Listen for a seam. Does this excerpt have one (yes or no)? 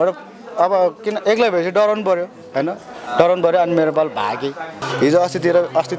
yes